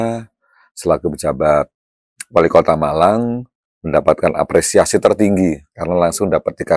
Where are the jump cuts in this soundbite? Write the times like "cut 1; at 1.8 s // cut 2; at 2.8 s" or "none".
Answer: none